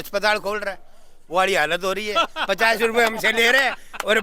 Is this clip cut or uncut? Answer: uncut